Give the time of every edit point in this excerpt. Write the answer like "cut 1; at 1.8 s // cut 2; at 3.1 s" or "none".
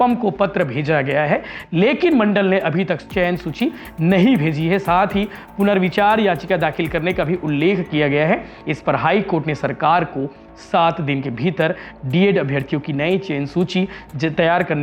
none